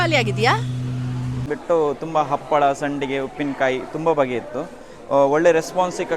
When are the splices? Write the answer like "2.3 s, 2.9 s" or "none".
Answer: 1.5 s